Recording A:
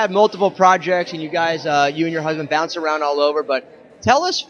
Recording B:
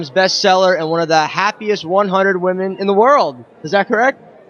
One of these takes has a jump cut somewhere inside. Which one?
B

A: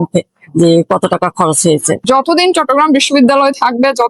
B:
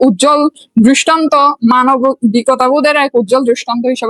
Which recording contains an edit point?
A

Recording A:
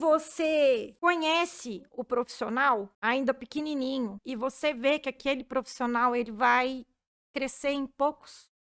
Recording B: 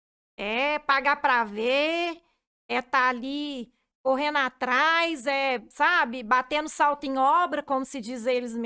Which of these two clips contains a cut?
A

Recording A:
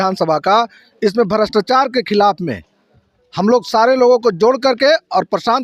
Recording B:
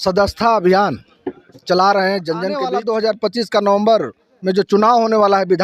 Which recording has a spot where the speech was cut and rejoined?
B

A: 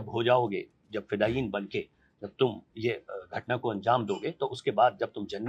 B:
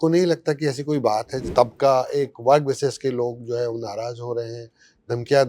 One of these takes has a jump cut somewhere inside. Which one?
B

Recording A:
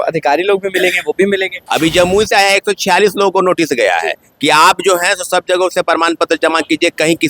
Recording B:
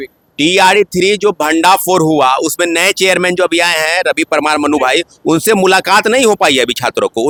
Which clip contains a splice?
A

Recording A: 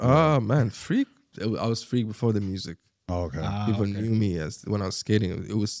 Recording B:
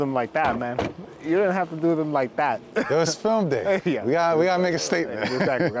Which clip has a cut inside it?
A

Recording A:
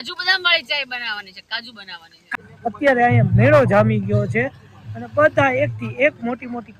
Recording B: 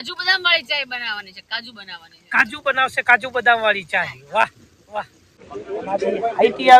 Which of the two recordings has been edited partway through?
A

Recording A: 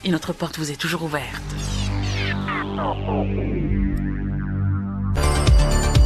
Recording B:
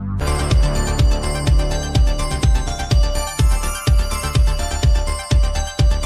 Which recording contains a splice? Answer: A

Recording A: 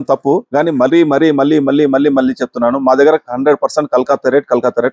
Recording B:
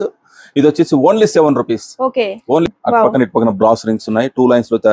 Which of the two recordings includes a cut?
B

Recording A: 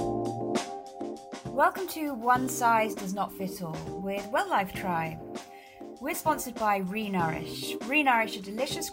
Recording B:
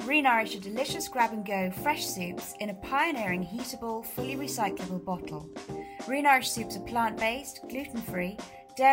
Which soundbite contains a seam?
A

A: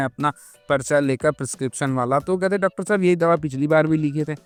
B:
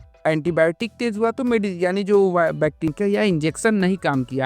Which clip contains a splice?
B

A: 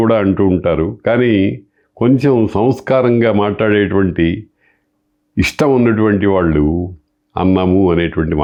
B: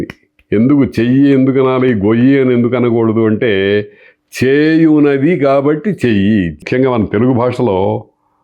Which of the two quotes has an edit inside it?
B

